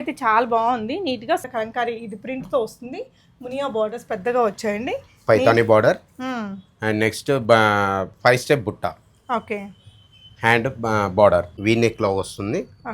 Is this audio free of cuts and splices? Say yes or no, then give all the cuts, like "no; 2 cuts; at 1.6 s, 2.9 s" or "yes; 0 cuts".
no; 2 cuts; at 1.5 s, 11.5 s